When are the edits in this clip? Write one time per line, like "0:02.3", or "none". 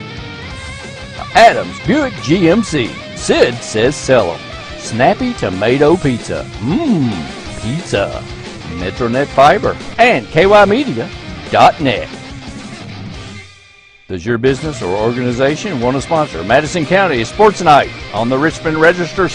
0:09.8